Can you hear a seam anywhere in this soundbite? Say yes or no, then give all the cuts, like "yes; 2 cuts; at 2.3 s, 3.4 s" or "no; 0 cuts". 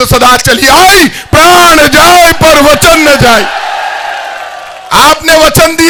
no; 0 cuts